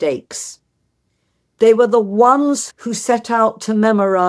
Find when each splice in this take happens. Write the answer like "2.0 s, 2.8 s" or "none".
2.7 s